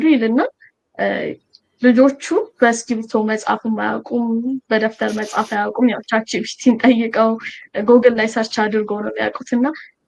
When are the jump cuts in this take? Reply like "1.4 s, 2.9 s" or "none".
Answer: none